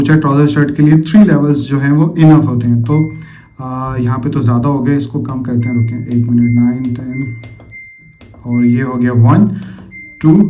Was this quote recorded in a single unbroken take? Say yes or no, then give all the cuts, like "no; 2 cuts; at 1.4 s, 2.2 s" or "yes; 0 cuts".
yes; 0 cuts